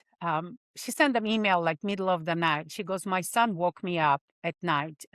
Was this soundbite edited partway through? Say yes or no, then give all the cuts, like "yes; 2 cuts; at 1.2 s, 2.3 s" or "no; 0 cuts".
no; 0 cuts